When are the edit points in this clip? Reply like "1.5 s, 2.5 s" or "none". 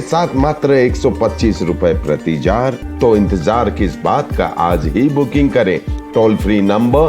2.8 s